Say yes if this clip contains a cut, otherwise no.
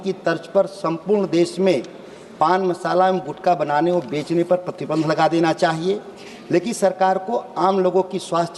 no